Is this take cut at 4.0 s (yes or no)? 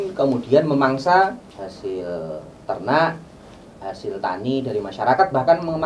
no